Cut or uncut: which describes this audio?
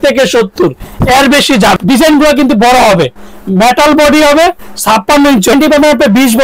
cut